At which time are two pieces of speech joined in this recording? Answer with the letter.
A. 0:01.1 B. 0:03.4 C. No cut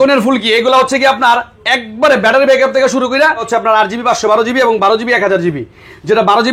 B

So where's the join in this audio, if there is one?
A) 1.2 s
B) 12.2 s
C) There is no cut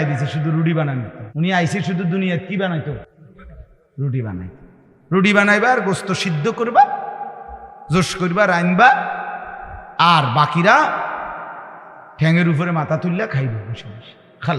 A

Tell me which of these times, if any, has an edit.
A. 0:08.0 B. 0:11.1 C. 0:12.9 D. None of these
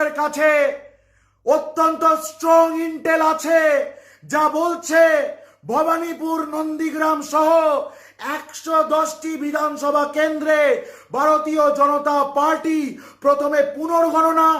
D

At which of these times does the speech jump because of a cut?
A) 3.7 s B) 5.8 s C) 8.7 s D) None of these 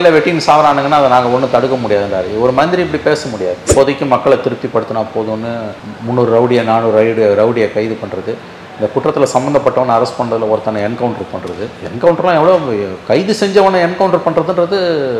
A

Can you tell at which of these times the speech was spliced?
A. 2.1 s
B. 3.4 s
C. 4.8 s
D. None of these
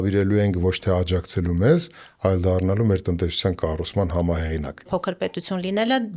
C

